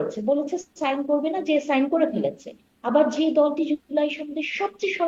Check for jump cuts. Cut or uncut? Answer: uncut